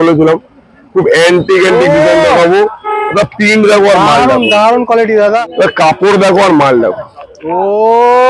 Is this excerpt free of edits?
no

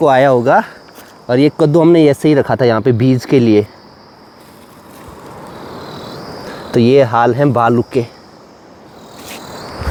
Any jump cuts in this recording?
no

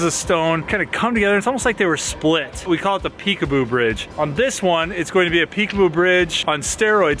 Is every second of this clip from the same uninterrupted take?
yes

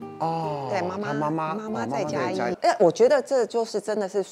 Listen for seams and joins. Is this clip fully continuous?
no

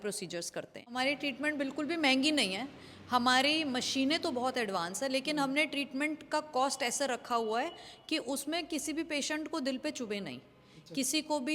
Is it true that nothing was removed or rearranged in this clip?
no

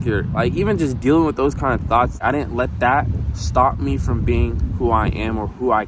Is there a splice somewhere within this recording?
yes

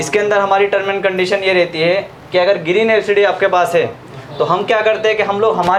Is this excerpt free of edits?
yes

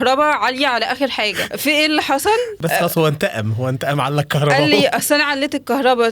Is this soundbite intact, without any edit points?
no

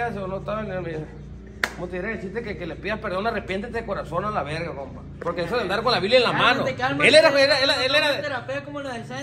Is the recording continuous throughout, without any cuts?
yes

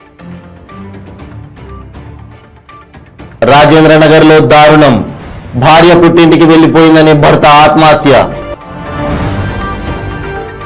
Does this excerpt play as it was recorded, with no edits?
no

